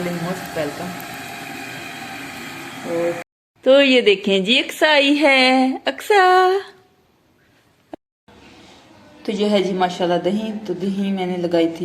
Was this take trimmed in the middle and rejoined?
yes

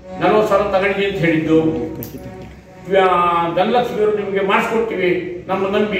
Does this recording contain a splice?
no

